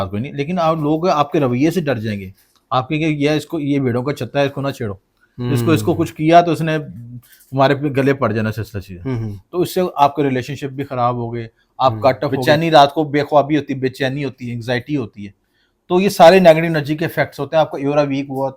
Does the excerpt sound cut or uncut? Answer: cut